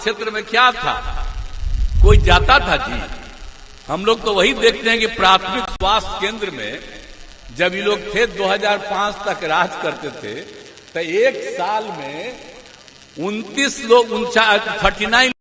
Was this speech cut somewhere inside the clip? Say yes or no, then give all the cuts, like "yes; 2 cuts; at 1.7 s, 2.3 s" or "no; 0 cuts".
no; 0 cuts